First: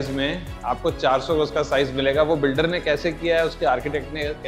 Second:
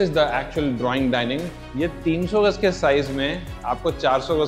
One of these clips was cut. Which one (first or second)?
second